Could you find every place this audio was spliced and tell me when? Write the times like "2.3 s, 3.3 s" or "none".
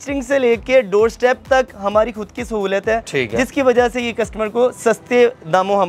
none